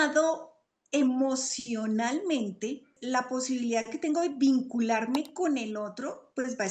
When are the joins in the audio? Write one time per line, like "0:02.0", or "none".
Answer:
0:02.9